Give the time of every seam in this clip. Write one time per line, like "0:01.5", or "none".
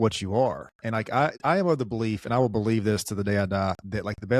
0:01.4

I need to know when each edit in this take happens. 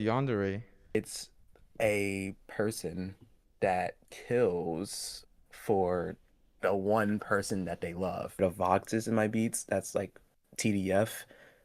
0:00.9
0:08.4

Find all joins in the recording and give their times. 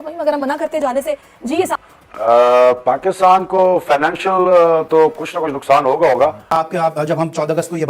none

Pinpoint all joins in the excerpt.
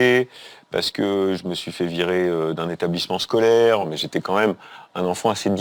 0:03.9

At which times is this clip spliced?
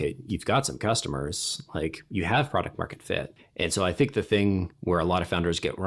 0:03.4

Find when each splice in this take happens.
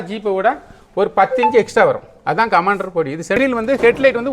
0:03.4

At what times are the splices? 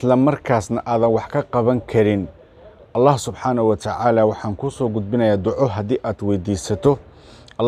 none

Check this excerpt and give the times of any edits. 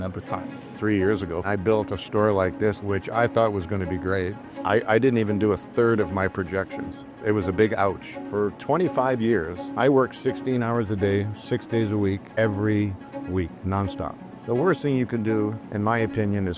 0:01.4
0:02.8
0:04.4
0:07.2
0:08.1
0:14.4

